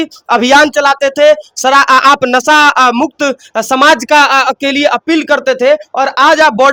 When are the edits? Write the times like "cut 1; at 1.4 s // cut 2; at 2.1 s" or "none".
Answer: none